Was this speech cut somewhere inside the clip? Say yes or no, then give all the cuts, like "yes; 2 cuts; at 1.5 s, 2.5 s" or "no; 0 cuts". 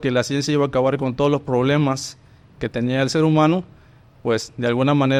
no; 0 cuts